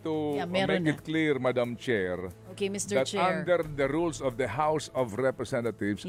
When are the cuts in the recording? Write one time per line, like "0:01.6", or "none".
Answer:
none